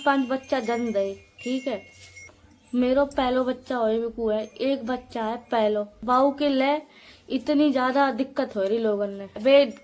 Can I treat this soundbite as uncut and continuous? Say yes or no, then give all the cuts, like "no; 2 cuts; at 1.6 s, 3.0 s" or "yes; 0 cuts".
yes; 0 cuts